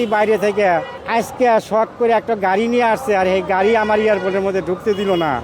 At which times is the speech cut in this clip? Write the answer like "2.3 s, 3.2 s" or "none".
1.0 s